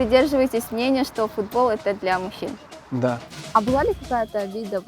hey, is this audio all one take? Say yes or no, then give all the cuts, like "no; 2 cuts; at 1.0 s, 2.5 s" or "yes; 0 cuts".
no; 1 cut; at 3.3 s